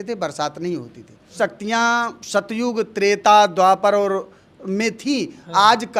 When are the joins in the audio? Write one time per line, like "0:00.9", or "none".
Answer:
0:01.3